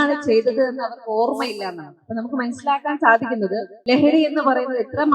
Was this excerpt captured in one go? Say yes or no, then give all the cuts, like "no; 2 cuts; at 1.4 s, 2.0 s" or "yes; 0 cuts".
no; 1 cut; at 3.7 s